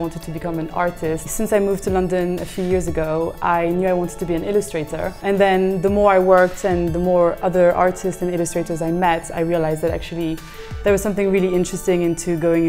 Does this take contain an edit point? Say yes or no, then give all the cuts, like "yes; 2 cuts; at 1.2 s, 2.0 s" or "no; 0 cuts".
yes; 2 cuts; at 1.3 s, 5.2 s